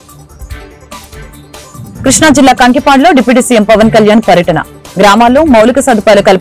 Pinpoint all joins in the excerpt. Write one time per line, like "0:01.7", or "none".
0:00.9